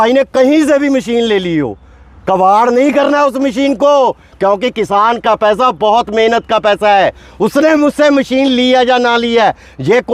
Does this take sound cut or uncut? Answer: uncut